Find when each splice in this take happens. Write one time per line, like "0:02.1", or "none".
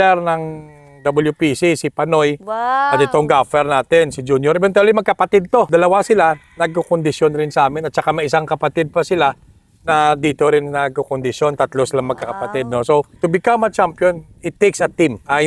none